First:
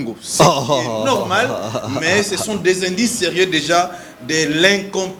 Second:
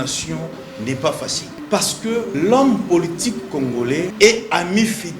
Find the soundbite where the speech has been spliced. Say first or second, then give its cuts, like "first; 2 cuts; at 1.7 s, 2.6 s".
second; 3 cuts; at 1.5 s, 2.3 s, 4.1 s